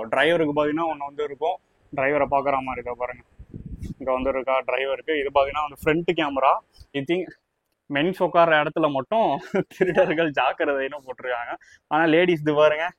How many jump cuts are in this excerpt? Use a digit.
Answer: 1